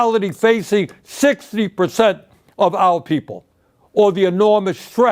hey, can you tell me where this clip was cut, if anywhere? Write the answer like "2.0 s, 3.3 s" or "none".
4.0 s